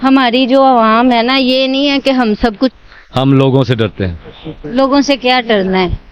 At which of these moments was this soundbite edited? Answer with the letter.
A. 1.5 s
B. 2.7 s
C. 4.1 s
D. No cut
B